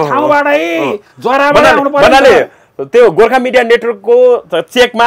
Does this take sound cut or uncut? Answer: uncut